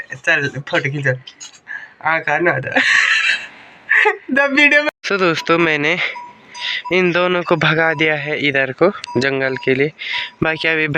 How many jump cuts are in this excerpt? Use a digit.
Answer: 1